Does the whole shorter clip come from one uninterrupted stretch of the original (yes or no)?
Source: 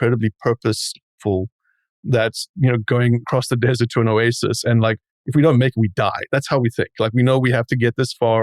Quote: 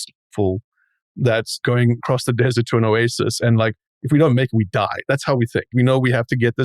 no